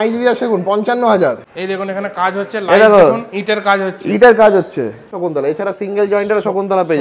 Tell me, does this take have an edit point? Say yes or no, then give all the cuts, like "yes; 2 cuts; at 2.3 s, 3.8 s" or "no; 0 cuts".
yes; 2 cuts; at 1.5 s, 5.1 s